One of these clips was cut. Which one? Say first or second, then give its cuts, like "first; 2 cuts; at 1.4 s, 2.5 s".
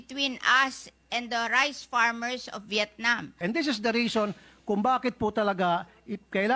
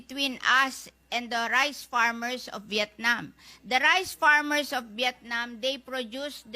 first; 1 cut; at 3.4 s